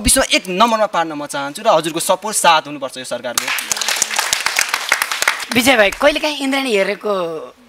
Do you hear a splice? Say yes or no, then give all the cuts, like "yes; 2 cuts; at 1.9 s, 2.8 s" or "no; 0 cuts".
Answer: no; 0 cuts